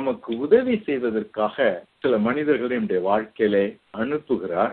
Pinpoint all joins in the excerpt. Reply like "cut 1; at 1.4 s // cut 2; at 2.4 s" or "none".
cut 1; at 1.9 s // cut 2; at 3.8 s